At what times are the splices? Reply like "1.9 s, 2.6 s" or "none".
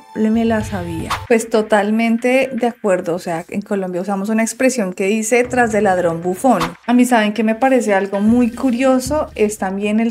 1.2 s, 6.7 s